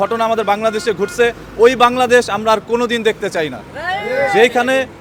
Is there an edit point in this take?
no; 0 cuts

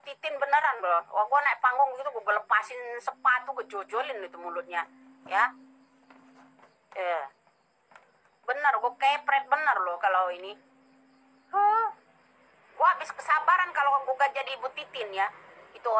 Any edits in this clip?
no; 0 cuts

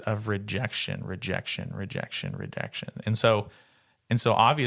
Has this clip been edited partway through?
no; 0 cuts

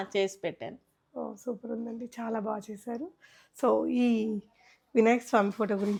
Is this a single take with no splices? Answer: yes; 0 cuts

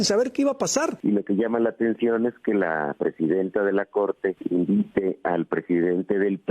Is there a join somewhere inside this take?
yes; 2 cuts; at 1.0 s, 4.4 s

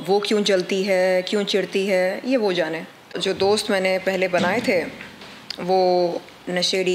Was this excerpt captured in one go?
no; 1 cut; at 3.1 s

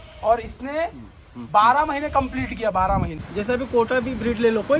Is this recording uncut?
no; 1 cut; at 3.2 s

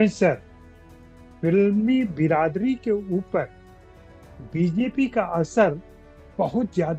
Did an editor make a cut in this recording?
no; 0 cuts

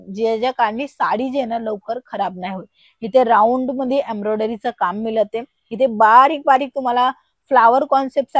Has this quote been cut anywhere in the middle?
no; 0 cuts

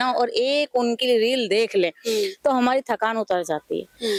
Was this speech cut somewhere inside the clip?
no; 0 cuts

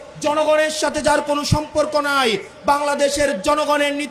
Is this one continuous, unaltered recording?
yes; 0 cuts

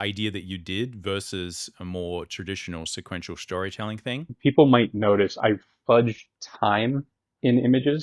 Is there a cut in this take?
yes; 1 cut; at 4.3 s

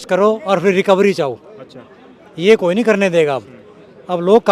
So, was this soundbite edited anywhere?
no; 0 cuts

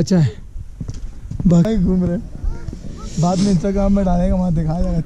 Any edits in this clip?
yes; 1 cut; at 1.7 s

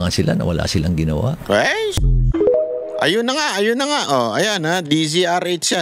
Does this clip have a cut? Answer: no; 0 cuts

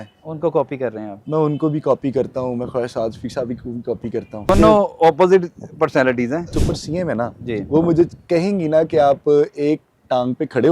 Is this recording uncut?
no; 2 cuts; at 4.5 s, 6.5 s

